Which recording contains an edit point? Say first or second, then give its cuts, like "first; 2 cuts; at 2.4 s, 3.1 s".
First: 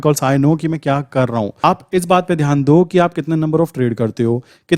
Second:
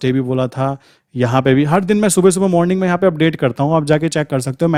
first; 1 cut; at 1.6 s